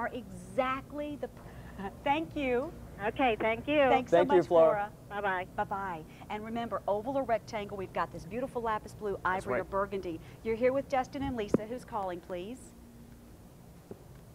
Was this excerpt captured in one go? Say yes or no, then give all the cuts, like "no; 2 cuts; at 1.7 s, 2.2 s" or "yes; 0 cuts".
no; 1 cut; at 1.3 s